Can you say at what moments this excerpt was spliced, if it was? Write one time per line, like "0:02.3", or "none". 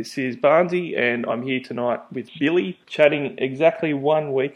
0:02.8